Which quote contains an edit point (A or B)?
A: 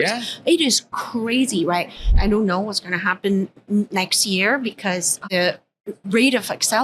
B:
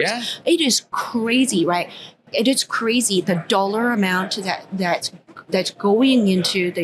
A